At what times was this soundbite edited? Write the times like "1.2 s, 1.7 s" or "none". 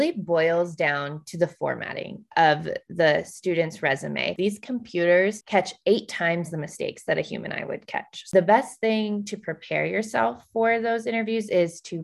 4.3 s, 8.3 s